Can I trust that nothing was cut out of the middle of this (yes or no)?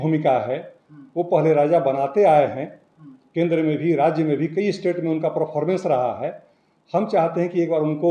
yes